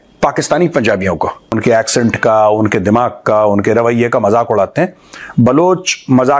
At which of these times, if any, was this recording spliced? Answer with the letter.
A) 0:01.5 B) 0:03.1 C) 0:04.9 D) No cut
A